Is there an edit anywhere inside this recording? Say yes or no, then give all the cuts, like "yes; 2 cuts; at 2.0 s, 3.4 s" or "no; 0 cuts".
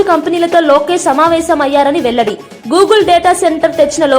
no; 0 cuts